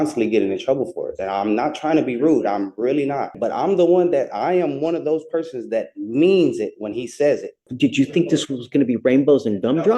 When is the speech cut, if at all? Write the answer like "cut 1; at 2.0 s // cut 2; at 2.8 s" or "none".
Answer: cut 1; at 3.3 s // cut 2; at 7.7 s